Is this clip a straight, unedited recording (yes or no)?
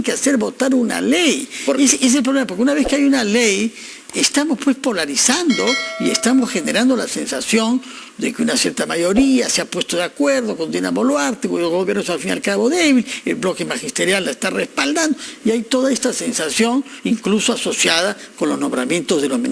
yes